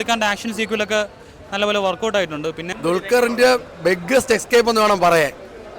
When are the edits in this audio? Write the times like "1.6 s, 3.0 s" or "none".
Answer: 2.7 s